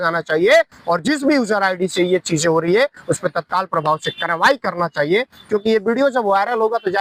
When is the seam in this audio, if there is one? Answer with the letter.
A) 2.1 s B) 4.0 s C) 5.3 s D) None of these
D